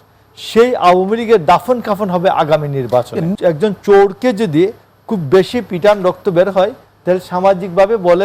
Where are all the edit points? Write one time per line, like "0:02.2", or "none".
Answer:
0:03.3